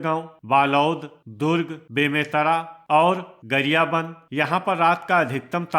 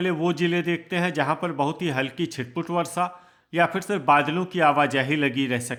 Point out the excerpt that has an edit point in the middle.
first; 2 cuts; at 2.8 s, 4.2 s

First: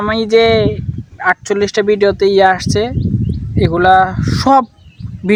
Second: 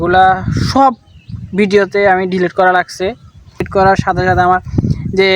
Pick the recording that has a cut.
second; 1 cut; at 3.7 s

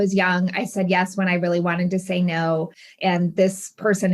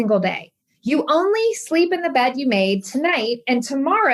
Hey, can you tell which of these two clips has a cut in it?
first; 1 cut; at 2.9 s

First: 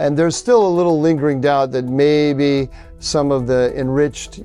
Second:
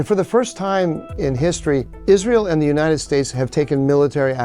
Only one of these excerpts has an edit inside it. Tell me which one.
second; 1 cut; at 1.4 s

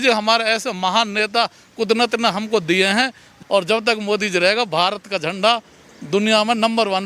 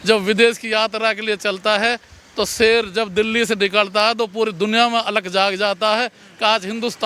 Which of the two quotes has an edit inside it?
first; 1 cut; at 3.3 s

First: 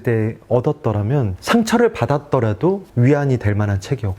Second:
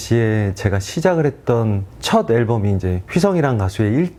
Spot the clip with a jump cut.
first; 2 cuts; at 1.3 s, 2.9 s

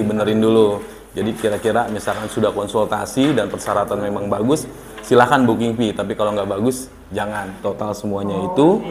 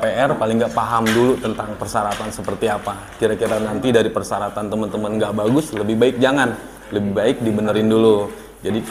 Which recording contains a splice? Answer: first; 1 cut; at 7.6 s

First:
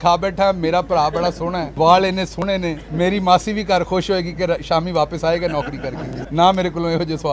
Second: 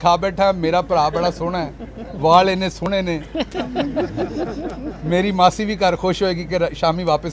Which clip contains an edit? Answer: first; 3 cuts; at 1.7 s, 2.8 s, 6.1 s

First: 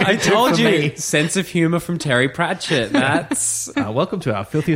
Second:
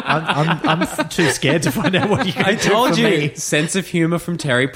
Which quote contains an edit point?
first; 1 cut; at 3.7 s

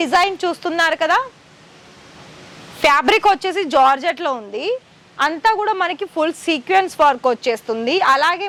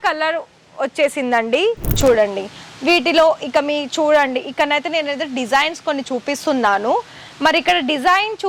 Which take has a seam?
second; 1 cut; at 2.0 s

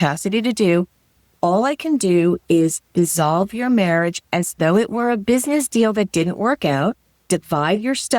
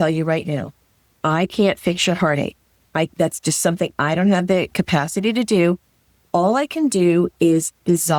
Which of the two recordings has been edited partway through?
first; 1 cut; at 7.1 s

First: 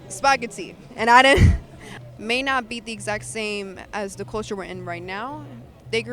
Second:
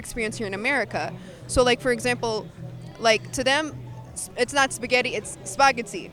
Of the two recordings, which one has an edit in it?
first; 1 cut; at 1.9 s

